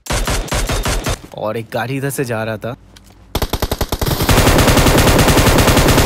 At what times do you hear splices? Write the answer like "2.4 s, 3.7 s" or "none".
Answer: 1.2 s

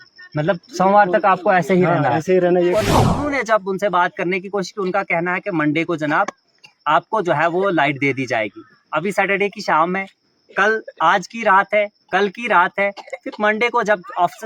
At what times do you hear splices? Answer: 2.8 s

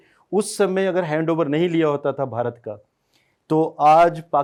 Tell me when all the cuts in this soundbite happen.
none

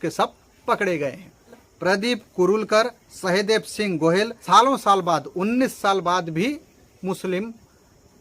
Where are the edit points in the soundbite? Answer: 4.4 s

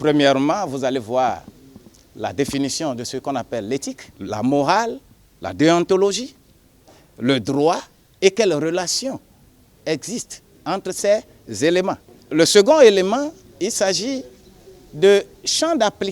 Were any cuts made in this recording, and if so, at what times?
4.1 s, 12.1 s

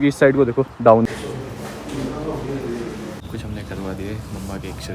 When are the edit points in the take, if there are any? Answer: 1.0 s, 3.2 s

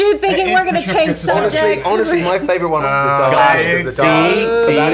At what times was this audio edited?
2.8 s

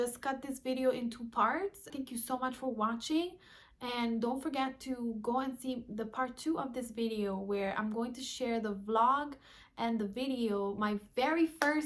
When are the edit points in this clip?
2.0 s

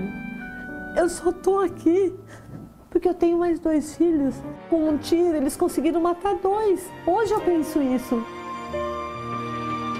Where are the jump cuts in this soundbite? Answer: 4.5 s

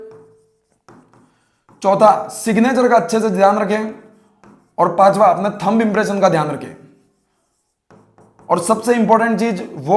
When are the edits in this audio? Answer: none

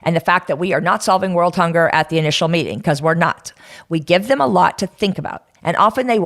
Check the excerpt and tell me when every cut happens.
3.5 s

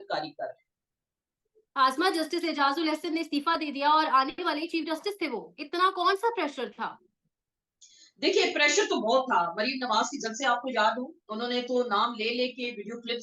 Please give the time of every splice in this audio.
none

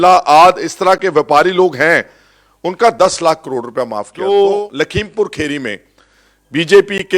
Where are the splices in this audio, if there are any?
4.1 s

